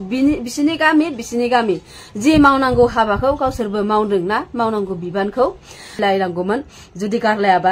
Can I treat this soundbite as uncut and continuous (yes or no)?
no